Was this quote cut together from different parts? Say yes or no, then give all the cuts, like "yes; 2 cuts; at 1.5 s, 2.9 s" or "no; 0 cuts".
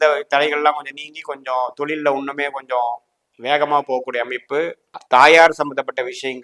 yes; 1 cut; at 4.9 s